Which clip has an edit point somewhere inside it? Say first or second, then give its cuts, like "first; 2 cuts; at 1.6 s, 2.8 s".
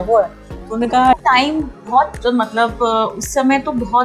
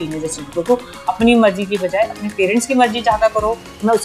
first; 1 cut; at 1.2 s